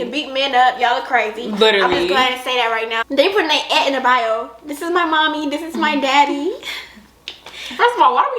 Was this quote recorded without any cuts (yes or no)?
no